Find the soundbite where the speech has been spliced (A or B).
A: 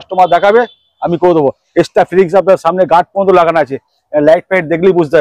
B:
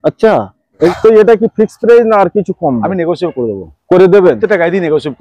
B